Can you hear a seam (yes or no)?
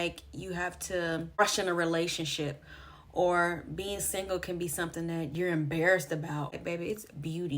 yes